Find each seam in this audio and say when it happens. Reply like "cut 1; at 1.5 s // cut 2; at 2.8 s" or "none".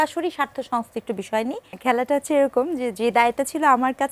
cut 1; at 1.8 s